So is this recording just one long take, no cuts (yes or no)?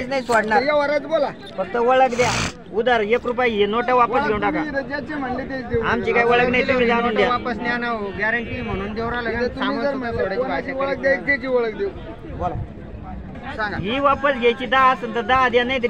no